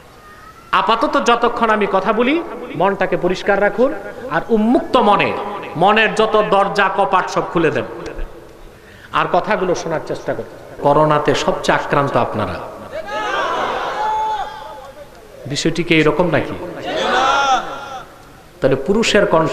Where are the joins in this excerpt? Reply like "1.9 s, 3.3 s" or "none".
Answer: 10.8 s